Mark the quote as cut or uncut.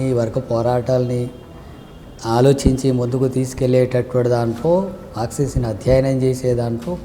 uncut